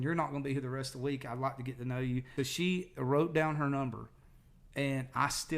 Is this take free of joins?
no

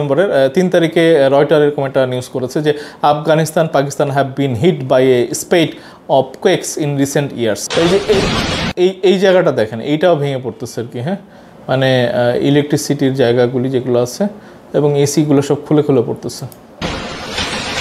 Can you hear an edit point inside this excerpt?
yes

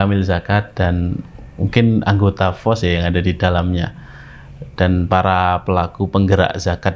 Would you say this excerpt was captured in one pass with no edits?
yes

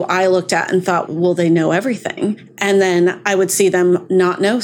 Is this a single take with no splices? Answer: yes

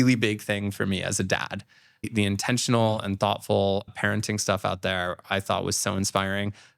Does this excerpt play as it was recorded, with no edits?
no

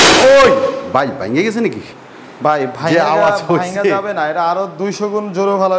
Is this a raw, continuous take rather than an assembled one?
yes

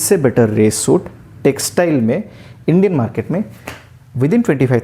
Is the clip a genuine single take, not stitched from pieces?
yes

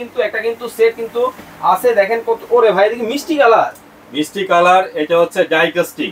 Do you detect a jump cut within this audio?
no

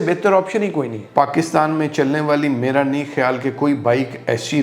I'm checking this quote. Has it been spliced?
yes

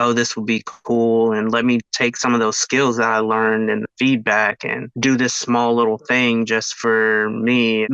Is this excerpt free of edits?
yes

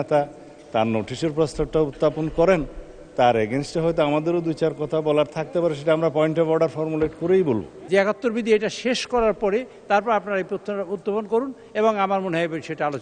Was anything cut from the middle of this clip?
yes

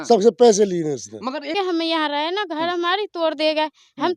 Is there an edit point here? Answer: yes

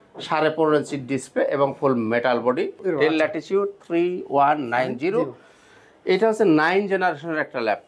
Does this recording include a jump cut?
yes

